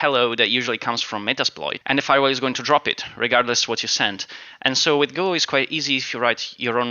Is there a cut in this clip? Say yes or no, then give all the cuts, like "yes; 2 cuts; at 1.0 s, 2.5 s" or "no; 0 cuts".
yes; 1 cut; at 1.7 s